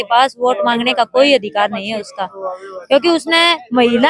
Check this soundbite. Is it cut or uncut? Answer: uncut